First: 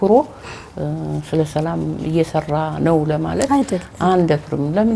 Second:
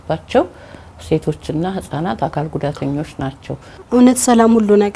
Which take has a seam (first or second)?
second